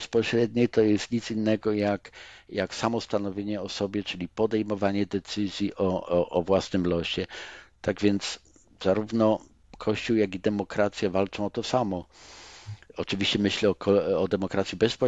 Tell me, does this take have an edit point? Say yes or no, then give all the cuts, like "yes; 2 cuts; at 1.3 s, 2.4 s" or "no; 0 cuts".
no; 0 cuts